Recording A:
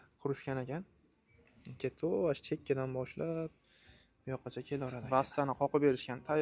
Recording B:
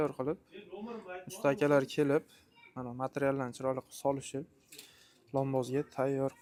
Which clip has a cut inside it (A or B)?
A